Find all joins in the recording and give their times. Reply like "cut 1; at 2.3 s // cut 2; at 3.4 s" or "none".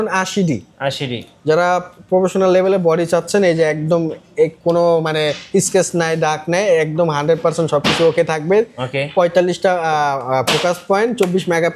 none